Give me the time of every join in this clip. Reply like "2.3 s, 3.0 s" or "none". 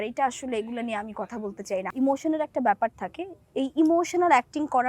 1.9 s

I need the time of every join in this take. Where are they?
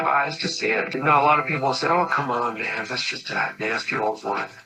1.0 s

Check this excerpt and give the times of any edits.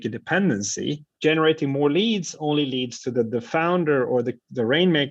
1.1 s

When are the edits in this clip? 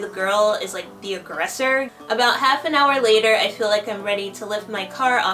1.9 s

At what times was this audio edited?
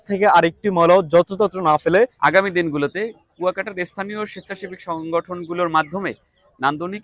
2.1 s

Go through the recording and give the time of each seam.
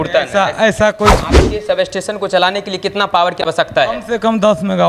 1.2 s

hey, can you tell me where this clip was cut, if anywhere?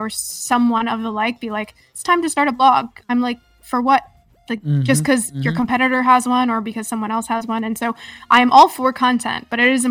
none

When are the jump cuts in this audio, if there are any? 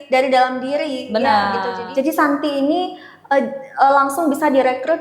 1.8 s

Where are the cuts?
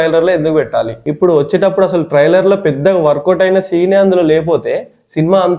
1.0 s

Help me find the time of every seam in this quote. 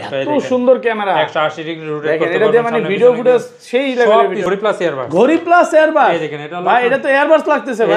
4.5 s

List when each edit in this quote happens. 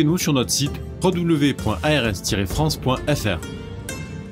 3.4 s

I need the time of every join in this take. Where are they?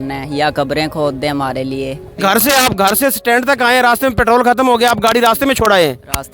2.2 s

